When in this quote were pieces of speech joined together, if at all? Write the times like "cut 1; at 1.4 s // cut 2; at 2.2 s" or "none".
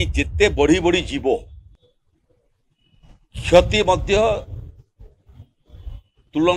none